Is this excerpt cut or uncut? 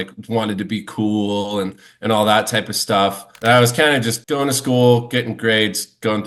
cut